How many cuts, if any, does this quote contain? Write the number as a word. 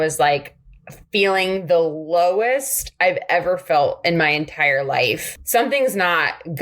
one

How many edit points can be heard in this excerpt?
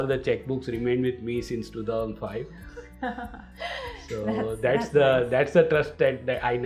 zero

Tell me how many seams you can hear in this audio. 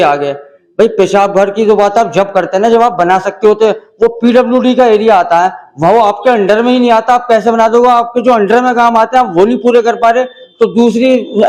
zero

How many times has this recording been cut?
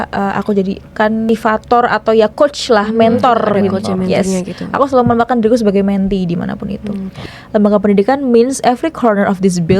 two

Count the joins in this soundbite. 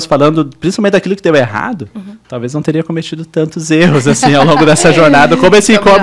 zero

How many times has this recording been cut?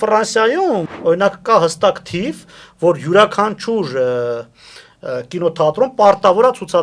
one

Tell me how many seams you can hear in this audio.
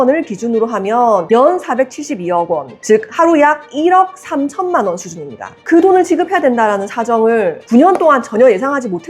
one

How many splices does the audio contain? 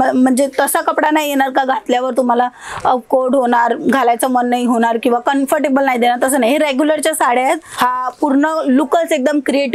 one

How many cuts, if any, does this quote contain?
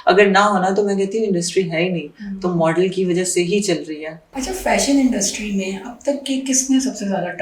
zero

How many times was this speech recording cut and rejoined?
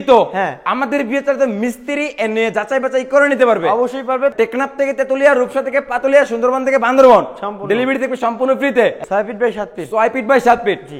two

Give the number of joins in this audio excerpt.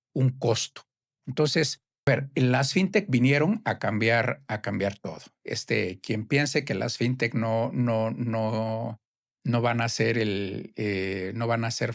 one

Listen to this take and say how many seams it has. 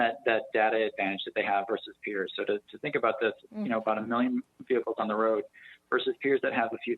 zero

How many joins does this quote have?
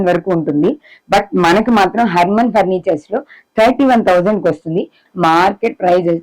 one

